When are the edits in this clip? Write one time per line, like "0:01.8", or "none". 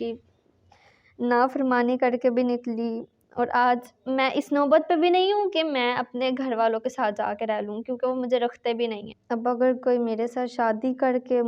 0:09.1